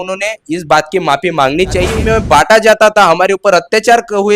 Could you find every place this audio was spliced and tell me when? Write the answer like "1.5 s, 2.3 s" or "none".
1.9 s